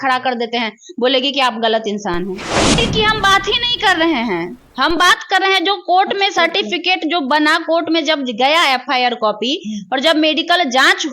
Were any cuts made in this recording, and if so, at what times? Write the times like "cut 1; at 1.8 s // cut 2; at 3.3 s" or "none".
cut 1; at 2.8 s